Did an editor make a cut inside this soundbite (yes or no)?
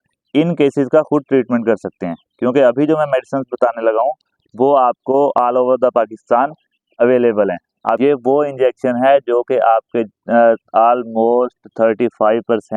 yes